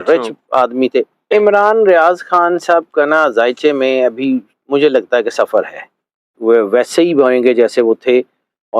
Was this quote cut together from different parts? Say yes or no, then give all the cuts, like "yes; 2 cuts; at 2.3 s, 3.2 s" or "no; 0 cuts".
yes; 2 cuts; at 1.3 s, 6.3 s